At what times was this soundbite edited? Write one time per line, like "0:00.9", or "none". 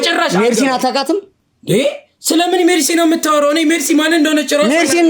none